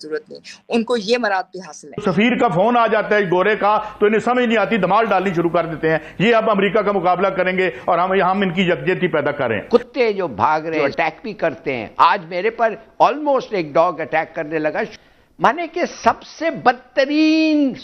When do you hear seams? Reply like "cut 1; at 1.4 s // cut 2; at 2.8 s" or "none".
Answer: cut 1; at 2.0 s // cut 2; at 9.6 s // cut 3; at 10.7 s // cut 4; at 14.9 s

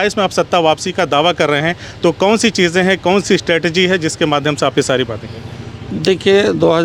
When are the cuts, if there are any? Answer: none

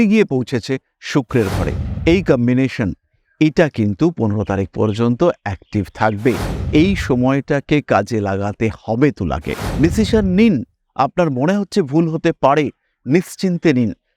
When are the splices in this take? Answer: cut 1; at 9.6 s

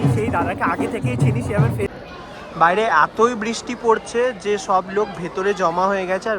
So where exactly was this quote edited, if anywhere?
cut 1; at 1.9 s

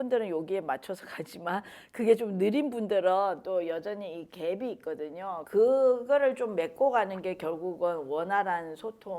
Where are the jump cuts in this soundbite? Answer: cut 1; at 5.4 s

